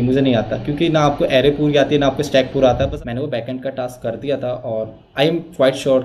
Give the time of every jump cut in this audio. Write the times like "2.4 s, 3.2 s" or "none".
2.9 s